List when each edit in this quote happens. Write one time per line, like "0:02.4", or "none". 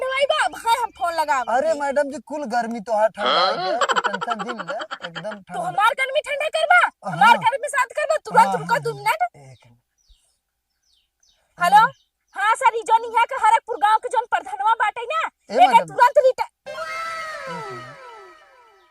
0:16.6